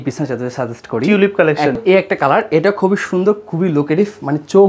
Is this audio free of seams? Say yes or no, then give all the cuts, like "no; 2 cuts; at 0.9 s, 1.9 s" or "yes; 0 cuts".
no; 1 cut; at 1.8 s